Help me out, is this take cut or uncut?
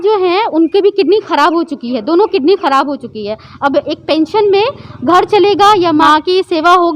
cut